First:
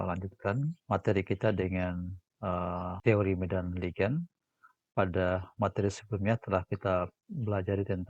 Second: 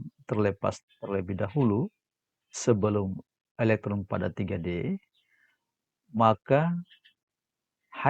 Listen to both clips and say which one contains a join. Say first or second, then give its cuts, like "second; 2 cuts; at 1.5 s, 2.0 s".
first; 2 cuts; at 0.8 s, 3.0 s